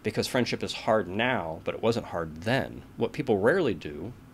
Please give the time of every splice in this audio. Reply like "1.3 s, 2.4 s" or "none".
none